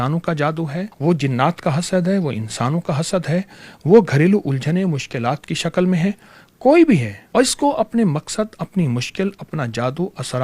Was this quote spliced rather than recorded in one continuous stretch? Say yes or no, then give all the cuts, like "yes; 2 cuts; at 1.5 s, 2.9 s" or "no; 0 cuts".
yes; 2 cuts; at 0.9 s, 7.2 s